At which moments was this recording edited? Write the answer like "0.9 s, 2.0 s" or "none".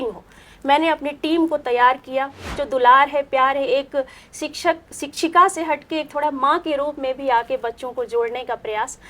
2.5 s